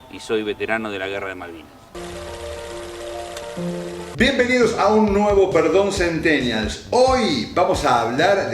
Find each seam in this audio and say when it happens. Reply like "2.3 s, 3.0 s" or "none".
2.0 s, 4.1 s